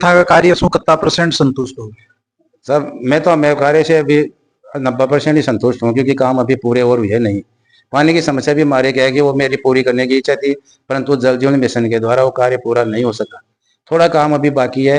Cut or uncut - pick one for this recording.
uncut